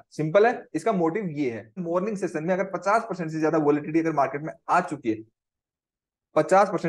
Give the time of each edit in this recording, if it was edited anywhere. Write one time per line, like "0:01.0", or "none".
0:01.8